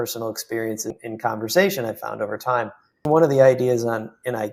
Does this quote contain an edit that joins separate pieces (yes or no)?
yes